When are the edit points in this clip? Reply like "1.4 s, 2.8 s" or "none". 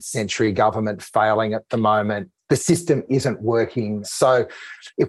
4.0 s